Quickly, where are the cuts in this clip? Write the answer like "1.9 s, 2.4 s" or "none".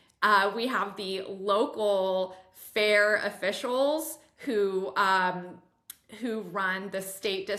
none